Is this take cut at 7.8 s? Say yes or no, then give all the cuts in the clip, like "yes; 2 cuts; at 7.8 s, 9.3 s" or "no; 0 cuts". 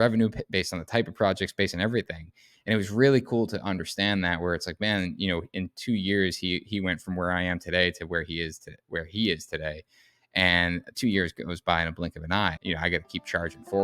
no; 1 cut; at 12.6 s